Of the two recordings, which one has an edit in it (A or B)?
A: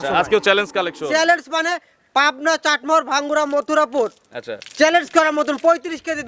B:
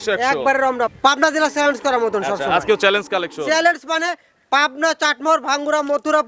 B